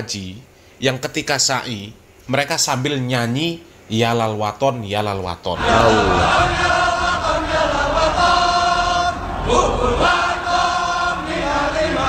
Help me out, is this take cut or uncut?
uncut